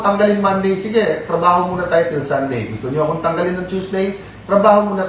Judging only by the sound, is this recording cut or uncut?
uncut